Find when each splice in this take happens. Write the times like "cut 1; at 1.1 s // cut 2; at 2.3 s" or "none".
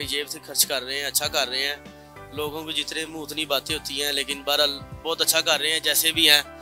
none